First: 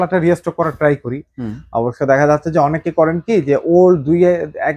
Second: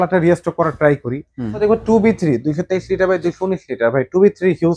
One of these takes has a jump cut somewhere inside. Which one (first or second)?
second